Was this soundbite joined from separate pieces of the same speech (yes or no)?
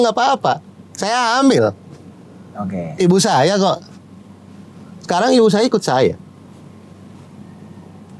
no